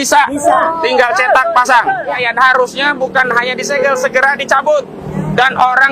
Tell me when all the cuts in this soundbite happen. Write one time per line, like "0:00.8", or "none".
0:02.2